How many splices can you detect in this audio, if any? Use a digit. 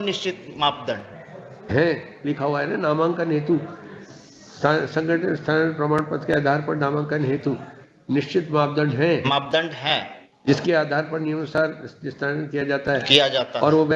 0